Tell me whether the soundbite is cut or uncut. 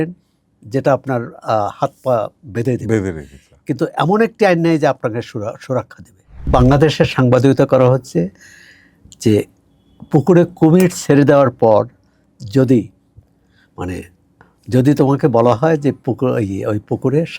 cut